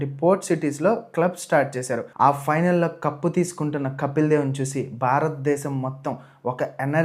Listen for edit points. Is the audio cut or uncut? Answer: cut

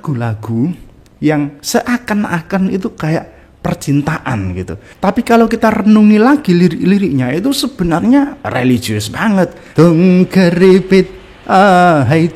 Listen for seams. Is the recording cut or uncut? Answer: cut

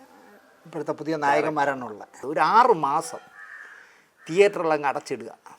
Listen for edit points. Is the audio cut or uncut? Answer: cut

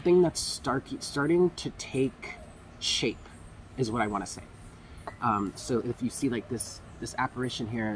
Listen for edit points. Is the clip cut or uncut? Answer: uncut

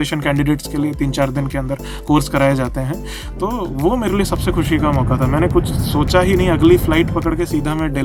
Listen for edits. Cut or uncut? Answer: uncut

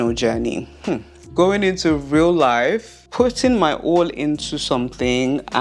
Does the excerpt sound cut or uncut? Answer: cut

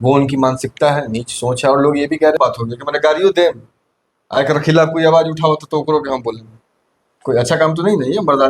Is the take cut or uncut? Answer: cut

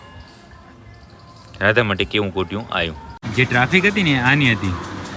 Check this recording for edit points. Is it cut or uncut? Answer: cut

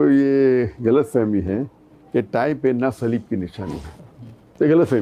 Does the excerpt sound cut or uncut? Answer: uncut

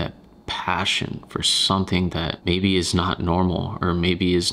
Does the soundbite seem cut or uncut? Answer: uncut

